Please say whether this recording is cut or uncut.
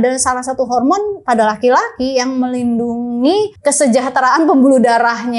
cut